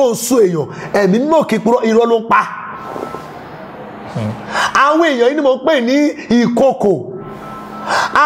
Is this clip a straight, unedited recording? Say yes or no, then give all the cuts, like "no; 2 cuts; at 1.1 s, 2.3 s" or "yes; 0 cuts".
yes; 0 cuts